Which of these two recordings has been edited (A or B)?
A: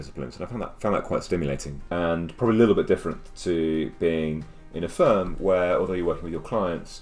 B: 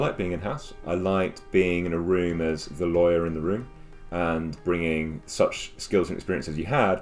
A